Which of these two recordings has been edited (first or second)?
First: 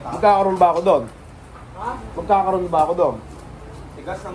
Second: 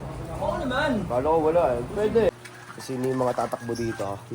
second